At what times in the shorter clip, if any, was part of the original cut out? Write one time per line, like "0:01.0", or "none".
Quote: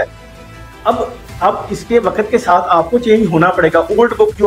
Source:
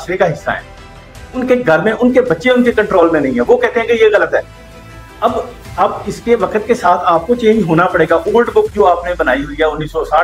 none